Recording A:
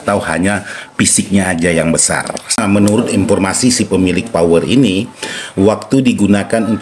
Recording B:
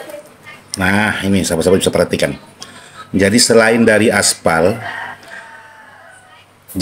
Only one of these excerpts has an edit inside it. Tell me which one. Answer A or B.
A